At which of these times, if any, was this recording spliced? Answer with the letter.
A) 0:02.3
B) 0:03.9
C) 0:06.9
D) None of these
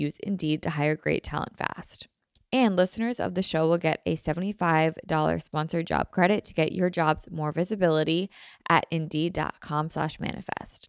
D